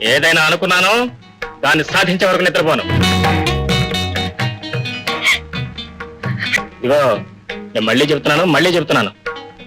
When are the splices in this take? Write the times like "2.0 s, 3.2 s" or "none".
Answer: 6.4 s